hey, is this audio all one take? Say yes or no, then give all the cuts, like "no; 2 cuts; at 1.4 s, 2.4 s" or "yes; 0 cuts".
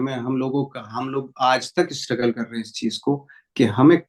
yes; 0 cuts